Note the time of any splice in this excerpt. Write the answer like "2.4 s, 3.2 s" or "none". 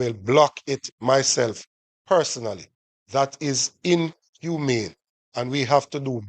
none